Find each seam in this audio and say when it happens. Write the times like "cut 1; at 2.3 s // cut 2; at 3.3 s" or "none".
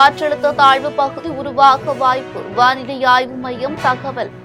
none